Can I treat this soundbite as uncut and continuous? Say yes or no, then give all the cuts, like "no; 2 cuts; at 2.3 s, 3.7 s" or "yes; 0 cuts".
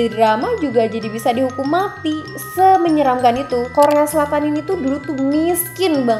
no; 1 cut; at 3.7 s